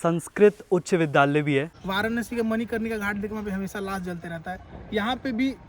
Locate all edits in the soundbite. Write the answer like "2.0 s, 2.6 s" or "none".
1.7 s